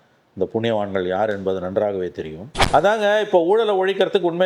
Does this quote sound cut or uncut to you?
cut